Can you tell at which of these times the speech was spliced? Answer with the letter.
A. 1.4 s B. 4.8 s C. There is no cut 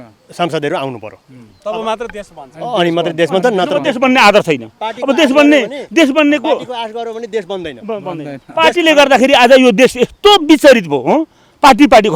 C